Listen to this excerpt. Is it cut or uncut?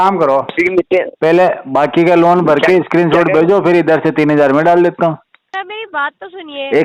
cut